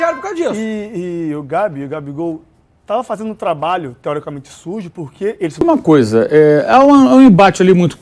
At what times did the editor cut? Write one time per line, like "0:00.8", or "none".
0:05.6